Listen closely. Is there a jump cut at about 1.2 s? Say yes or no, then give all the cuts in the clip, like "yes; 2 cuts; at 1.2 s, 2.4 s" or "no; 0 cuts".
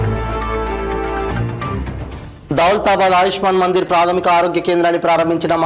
yes; 1 cut; at 1.2 s